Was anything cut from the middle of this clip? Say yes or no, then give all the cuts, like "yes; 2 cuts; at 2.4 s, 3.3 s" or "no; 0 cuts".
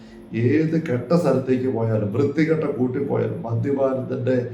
no; 0 cuts